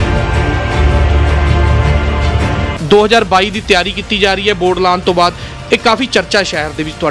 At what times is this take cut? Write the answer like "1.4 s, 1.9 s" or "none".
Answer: 2.7 s